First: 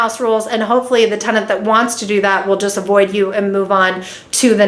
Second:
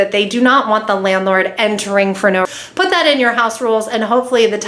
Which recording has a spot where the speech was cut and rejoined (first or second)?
second